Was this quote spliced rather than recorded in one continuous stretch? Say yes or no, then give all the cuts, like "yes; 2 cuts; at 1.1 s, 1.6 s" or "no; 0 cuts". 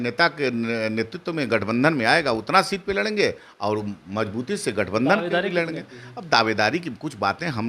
no; 0 cuts